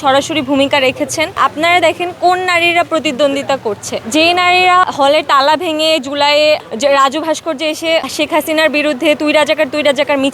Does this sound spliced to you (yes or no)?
yes